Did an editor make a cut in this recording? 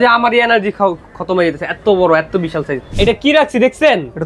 yes; 1 cut; at 2.8 s

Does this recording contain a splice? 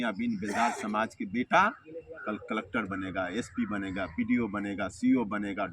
no; 0 cuts

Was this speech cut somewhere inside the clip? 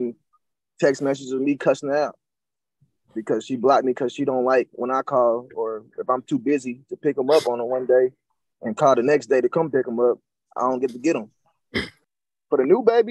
yes; 1 cut; at 12.0 s

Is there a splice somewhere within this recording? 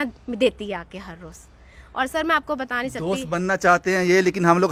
no; 0 cuts

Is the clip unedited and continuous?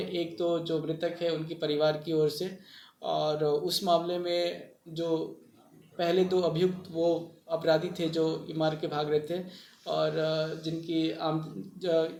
yes; 0 cuts

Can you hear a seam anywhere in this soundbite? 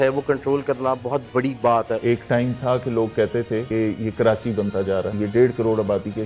yes; 3 cuts; at 1.9 s, 3.7 s, 5.1 s

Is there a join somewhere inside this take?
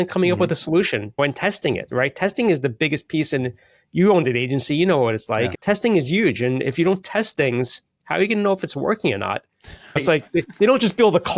yes; 3 cuts; at 1.2 s, 5.5 s, 10.0 s

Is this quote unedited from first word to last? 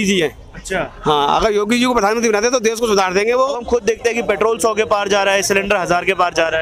no; 1 cut; at 3.6 s

